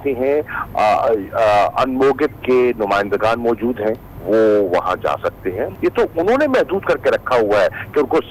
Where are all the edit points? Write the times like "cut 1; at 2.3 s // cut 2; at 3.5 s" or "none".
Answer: cut 1; at 4.2 s // cut 2; at 5.7 s